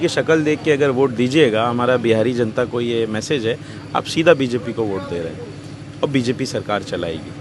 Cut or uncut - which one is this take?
uncut